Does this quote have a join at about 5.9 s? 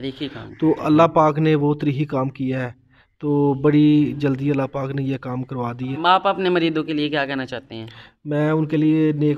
yes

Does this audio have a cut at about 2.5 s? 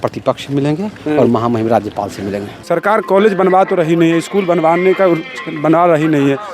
yes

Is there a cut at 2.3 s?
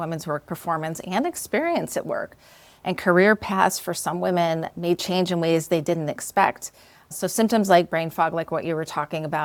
no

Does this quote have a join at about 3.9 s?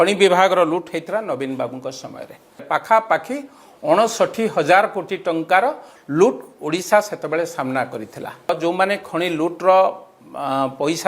no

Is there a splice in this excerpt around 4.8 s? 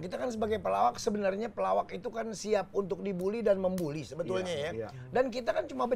no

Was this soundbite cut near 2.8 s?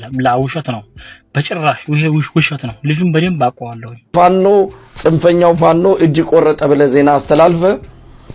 no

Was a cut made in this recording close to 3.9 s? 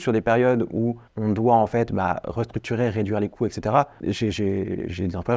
yes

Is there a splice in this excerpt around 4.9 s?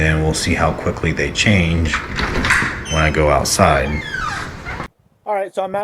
yes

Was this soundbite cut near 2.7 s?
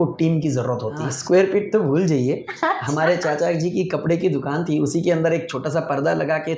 no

